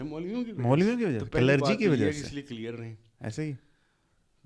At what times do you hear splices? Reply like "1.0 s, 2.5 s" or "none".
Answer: none